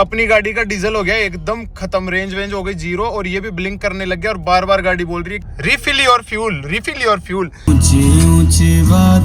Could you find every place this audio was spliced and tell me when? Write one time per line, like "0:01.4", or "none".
none